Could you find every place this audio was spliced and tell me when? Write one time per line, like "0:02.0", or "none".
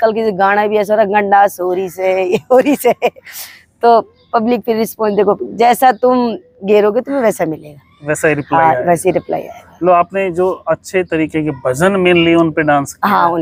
none